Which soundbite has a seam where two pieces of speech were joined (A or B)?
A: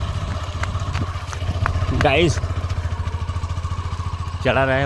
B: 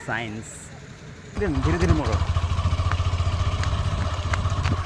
B